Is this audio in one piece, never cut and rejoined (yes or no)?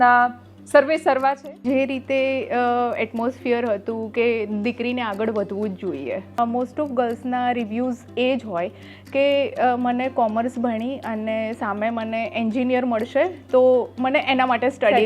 no